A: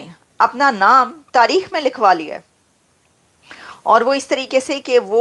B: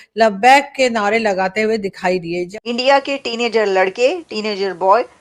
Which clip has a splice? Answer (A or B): B